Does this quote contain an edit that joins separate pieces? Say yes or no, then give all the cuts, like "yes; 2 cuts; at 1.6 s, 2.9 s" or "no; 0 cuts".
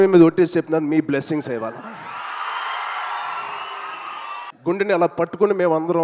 yes; 1 cut; at 4.5 s